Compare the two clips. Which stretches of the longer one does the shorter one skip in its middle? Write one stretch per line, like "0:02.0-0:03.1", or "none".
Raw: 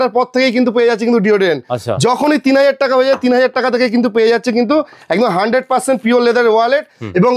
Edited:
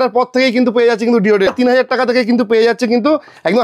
0:01.5-0:03.1